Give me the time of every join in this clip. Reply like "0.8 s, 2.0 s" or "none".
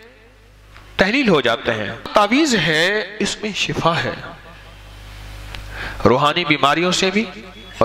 2.1 s